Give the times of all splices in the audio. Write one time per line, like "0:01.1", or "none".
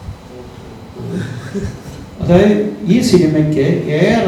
none